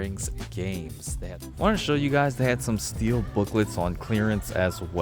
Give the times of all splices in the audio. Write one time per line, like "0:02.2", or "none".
0:01.3